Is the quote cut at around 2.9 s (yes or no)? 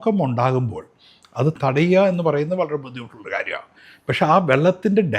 no